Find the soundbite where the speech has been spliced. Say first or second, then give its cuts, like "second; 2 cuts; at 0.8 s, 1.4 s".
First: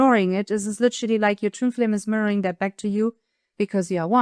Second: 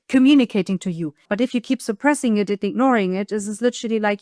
second; 1 cut; at 1.3 s